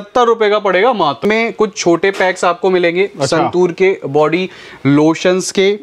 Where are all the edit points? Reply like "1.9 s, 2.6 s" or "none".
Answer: 1.2 s